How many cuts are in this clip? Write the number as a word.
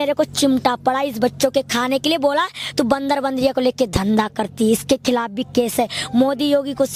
zero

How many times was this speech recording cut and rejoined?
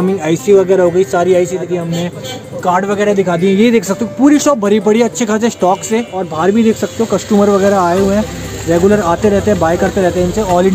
two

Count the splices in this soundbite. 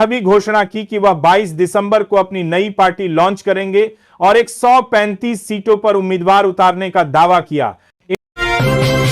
one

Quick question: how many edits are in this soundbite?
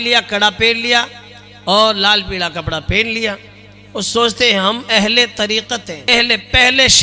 one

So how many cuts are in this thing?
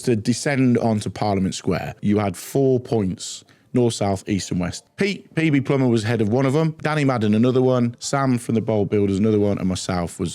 four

